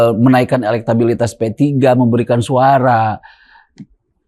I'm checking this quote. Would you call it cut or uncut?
uncut